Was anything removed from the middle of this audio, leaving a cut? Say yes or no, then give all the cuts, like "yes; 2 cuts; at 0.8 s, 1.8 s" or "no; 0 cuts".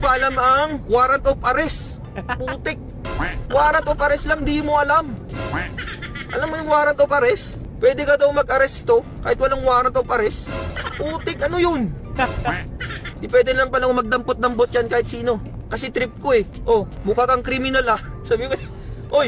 no; 0 cuts